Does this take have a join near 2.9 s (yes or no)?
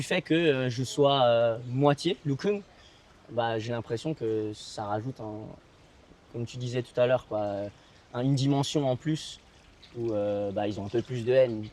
no